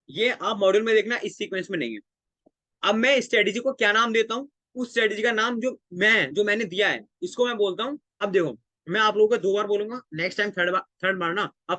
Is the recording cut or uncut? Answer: cut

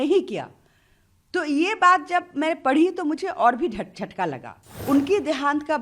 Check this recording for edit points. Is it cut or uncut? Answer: cut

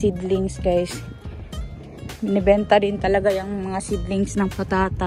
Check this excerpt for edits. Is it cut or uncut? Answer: uncut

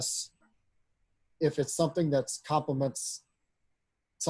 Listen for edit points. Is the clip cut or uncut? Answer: uncut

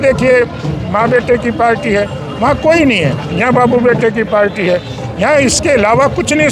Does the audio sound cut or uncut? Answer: uncut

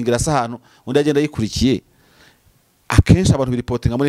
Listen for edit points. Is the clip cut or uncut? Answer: uncut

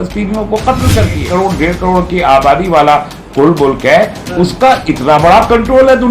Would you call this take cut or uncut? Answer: cut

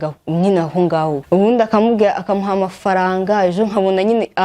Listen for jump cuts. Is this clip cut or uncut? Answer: cut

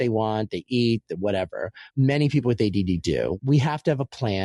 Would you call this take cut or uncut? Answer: cut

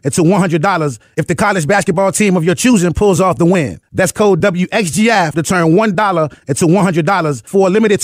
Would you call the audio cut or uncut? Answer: uncut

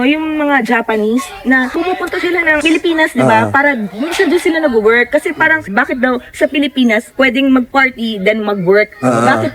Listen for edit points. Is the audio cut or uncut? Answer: uncut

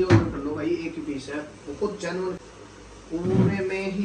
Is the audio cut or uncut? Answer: cut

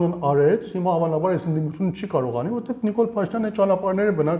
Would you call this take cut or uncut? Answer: uncut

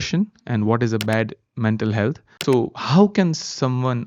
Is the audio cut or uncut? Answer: cut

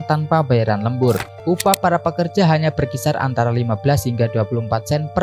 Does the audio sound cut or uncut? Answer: cut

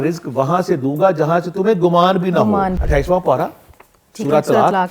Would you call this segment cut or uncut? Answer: uncut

